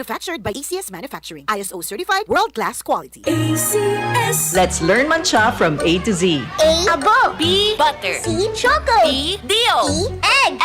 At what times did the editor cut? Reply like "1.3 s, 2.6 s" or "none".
4.4 s